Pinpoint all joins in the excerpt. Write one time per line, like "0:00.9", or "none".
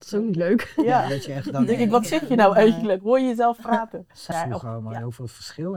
0:04.3